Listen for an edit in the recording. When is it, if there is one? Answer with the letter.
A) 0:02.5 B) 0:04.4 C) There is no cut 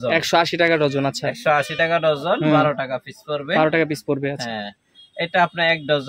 C